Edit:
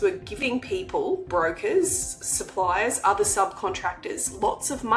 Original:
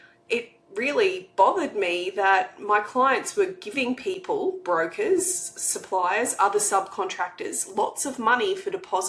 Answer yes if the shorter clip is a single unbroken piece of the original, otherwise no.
yes